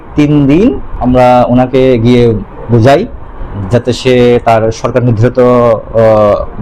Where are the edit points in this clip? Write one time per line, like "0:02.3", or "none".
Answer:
0:00.9